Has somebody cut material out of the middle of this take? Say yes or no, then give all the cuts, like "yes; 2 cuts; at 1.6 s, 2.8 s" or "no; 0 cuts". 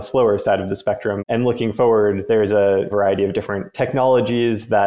yes; 2 cuts; at 1.2 s, 2.9 s